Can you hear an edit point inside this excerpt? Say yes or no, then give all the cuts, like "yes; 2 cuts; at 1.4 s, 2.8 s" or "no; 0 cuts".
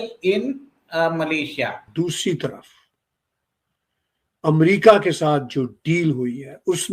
yes; 1 cut; at 1.9 s